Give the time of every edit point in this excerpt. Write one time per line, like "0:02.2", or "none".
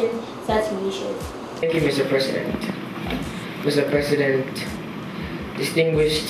none

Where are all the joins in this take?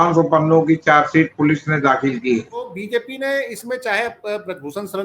0:02.8

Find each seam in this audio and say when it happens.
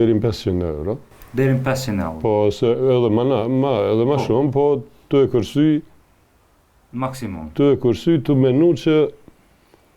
none

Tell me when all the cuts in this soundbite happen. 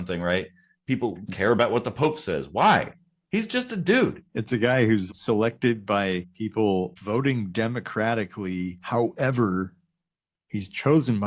0:04.3
0:05.1
0:06.3
0:07.0
0:08.8

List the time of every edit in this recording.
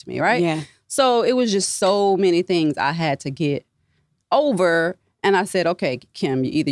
none

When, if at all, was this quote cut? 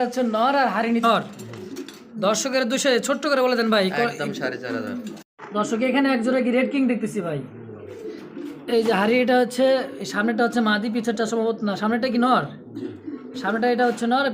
0:01.0
0:05.1

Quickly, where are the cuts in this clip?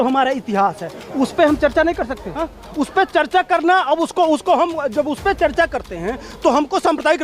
0:02.4

